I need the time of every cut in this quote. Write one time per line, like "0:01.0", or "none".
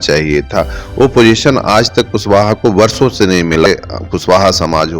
0:03.7